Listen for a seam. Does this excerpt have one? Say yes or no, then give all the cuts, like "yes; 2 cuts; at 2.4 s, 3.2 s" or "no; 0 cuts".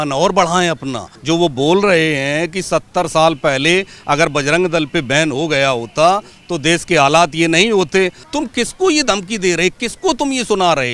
yes; 2 cuts; at 1.1 s, 8.2 s